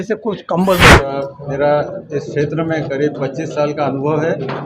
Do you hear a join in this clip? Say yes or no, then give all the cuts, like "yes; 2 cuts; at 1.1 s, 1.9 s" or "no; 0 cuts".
yes; 1 cut; at 1.1 s